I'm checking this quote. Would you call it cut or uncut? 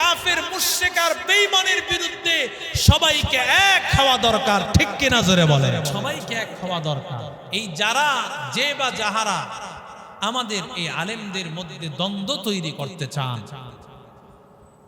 cut